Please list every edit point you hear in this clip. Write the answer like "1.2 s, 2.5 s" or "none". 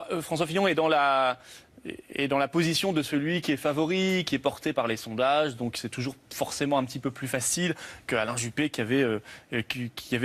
4.4 s